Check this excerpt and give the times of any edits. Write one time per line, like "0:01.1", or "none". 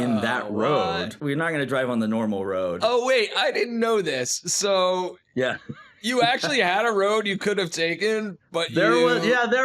0:01.2
0:02.8